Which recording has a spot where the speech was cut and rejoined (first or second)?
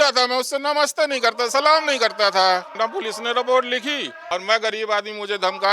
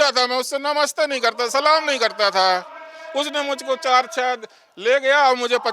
first